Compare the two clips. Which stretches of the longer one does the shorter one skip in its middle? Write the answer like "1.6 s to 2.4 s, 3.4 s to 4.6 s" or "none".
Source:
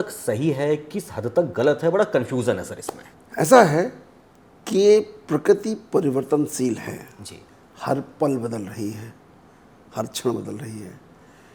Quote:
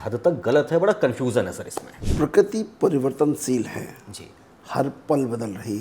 3.2 s to 5.2 s